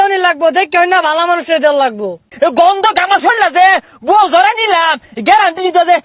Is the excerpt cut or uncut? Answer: cut